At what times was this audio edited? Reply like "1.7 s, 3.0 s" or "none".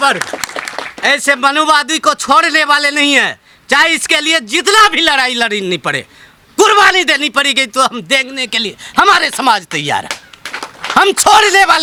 none